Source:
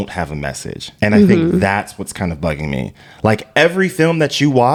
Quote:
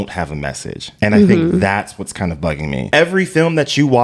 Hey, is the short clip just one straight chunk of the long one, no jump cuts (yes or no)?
no